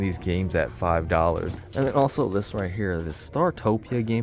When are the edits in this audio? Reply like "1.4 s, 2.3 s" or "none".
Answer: 1.5 s